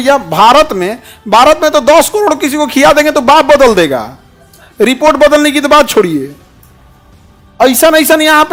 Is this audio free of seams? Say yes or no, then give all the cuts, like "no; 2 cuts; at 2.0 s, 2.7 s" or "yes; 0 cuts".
yes; 0 cuts